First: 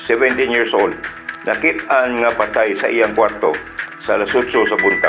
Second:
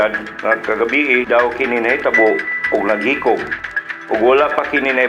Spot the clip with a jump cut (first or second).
second